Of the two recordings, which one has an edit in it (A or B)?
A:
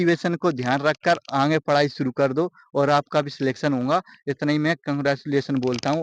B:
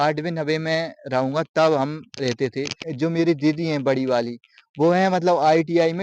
B